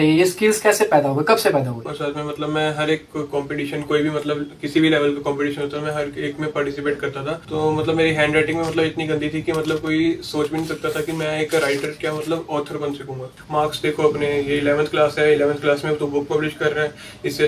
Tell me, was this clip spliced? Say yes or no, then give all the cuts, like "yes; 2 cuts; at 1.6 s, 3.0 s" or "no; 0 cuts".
yes; 3 cuts; at 1.9 s, 7.4 s, 13.3 s